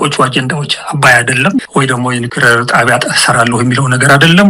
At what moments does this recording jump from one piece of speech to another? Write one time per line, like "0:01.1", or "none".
none